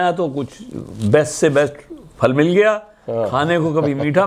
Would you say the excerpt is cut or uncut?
uncut